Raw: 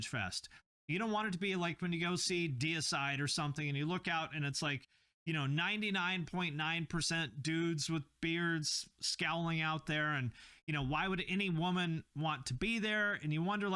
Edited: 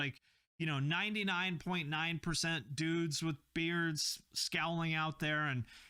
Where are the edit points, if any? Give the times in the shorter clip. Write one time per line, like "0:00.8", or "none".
none